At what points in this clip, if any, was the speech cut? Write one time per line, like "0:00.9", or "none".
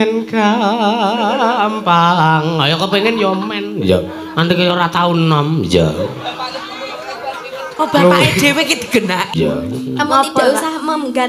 0:09.3